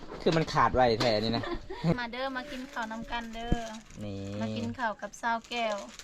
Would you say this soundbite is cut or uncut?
cut